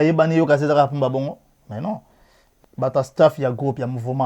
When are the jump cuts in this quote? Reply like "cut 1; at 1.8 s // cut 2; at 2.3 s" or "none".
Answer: cut 1; at 2.5 s